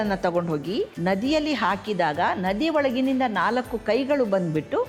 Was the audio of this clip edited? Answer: yes; 1 cut; at 0.9 s

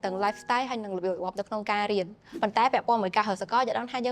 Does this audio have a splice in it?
yes; 1 cut; at 2.2 s

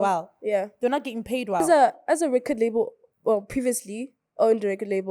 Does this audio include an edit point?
yes; 1 cut; at 1.6 s

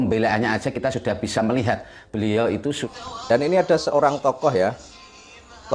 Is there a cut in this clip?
yes; 1 cut; at 2.8 s

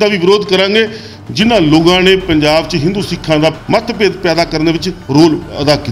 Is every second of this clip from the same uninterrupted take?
no; 1 cut; at 3.6 s

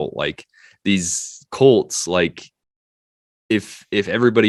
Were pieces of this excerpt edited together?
no; 0 cuts

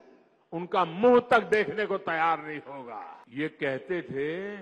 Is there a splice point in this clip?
yes; 1 cut; at 3.1 s

